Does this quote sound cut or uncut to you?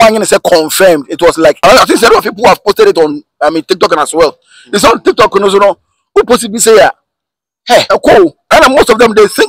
cut